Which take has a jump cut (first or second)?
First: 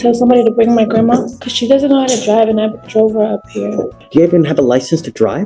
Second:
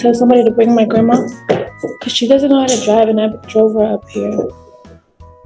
first